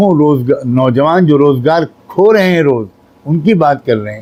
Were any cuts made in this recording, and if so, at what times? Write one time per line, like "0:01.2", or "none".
none